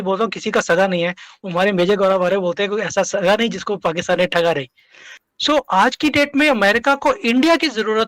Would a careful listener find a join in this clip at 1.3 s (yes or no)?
no